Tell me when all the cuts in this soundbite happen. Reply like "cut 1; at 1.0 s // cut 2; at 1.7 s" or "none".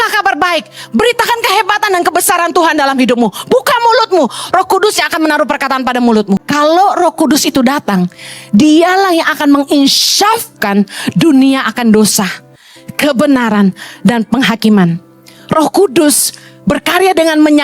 cut 1; at 6.5 s